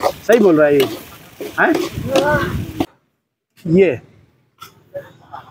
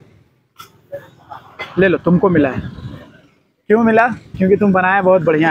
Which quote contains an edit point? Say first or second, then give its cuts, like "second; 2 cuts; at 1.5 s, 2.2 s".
first; 1 cut; at 2.9 s